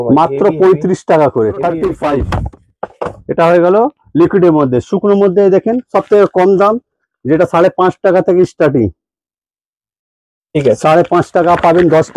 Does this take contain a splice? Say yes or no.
yes